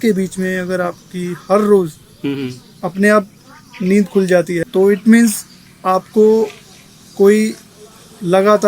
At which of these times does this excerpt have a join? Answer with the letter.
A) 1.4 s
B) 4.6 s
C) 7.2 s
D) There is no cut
B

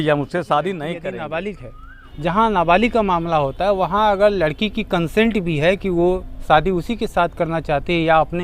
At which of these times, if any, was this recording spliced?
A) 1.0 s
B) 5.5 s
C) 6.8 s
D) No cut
A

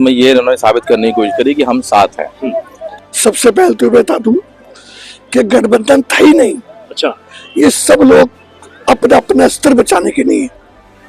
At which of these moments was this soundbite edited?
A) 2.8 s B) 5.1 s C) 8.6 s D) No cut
A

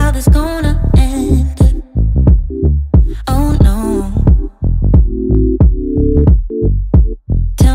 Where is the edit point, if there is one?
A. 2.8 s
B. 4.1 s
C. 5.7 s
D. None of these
A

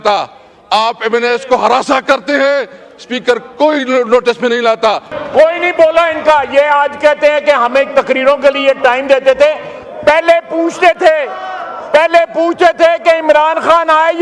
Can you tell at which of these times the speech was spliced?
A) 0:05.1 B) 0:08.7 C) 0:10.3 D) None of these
A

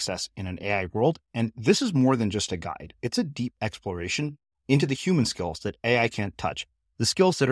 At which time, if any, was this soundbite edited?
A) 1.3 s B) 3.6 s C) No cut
C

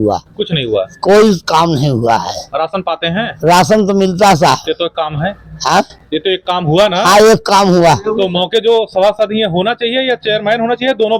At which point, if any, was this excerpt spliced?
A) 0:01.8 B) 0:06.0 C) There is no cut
C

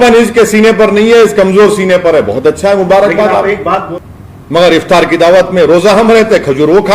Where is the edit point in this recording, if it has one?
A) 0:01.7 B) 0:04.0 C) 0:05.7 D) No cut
B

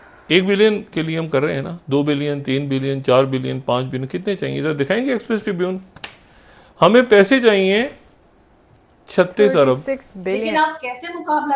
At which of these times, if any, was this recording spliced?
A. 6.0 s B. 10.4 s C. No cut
B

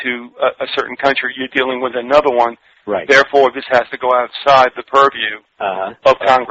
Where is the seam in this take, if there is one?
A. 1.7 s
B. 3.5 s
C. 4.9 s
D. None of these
B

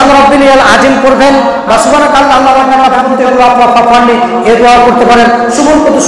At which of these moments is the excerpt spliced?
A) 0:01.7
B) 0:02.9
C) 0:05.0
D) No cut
B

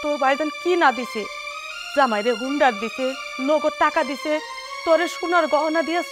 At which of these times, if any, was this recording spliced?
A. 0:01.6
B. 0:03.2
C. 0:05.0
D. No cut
D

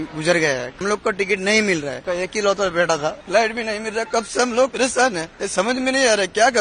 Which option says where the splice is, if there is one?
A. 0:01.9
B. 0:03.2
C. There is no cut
A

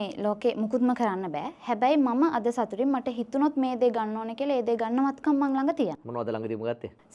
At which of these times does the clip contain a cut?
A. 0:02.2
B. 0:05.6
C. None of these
C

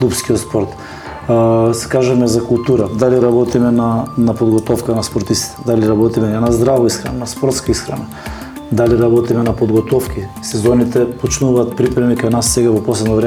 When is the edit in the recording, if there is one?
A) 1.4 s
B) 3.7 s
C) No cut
C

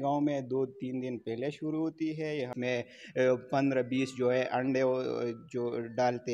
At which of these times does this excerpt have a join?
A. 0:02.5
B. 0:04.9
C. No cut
A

